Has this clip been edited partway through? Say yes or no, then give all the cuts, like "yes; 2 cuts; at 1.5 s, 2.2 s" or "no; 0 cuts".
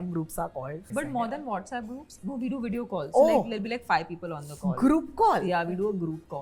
yes; 2 cuts; at 0.8 s, 2.2 s